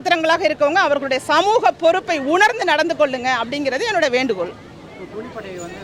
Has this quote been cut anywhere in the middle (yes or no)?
no